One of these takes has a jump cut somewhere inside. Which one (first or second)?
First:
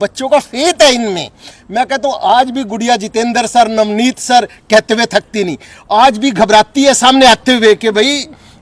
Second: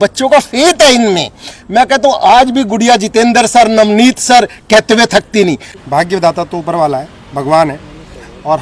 second